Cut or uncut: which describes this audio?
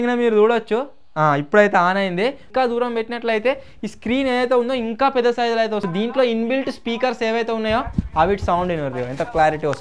cut